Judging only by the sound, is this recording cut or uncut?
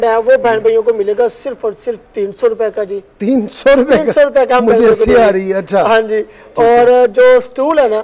uncut